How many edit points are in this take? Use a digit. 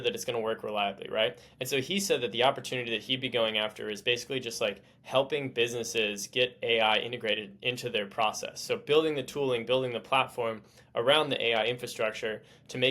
0